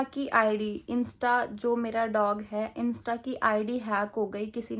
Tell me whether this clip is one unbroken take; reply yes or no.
yes